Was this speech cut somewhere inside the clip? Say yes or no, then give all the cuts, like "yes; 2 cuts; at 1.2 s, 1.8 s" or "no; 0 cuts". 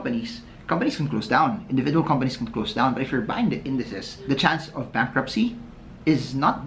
no; 0 cuts